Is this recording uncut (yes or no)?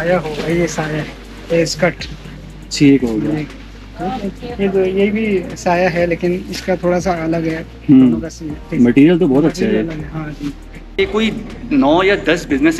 no